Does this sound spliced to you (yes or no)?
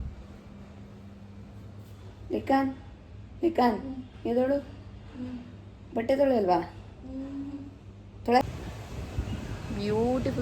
yes